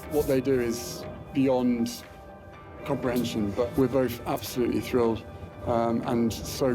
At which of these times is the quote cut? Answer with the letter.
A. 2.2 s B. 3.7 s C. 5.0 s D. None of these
B